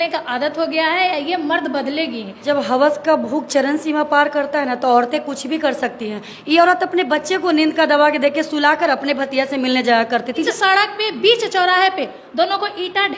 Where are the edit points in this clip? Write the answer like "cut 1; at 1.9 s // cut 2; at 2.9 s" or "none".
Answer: cut 1; at 2.3 s // cut 2; at 10.4 s